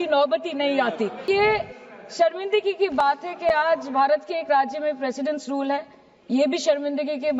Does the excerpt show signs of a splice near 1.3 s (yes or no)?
yes